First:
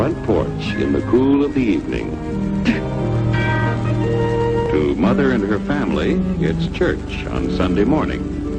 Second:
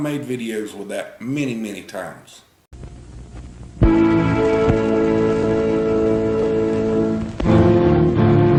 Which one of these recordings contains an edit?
first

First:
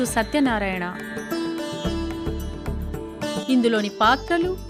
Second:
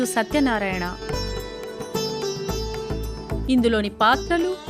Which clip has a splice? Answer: second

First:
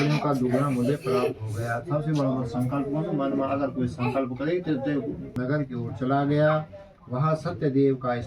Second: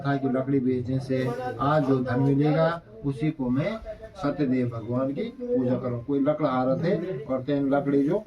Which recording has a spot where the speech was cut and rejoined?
first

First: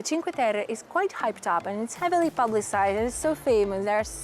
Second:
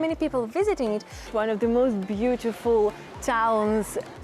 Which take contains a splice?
second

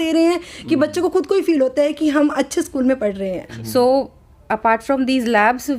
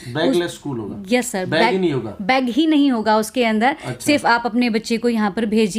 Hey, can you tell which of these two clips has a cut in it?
first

